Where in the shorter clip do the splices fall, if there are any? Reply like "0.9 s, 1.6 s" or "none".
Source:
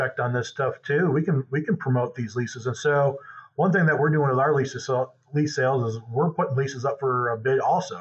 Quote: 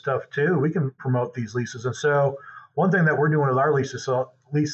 1.0 s